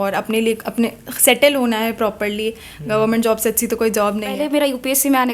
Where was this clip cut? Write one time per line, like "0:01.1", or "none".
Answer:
0:04.4

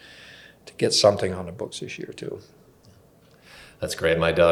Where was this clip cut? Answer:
none

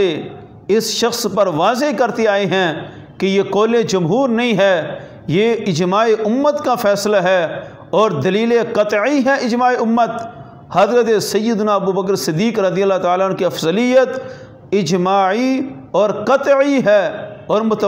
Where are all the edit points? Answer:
none

